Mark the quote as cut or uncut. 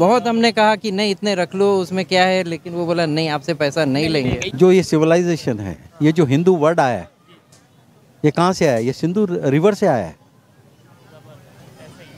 cut